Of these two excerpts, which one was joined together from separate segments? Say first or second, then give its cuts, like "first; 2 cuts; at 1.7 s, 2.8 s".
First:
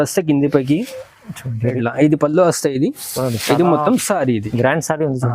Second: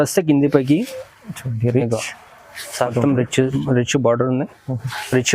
first; 1 cut; at 1.8 s